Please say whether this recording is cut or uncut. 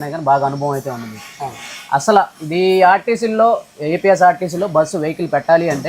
uncut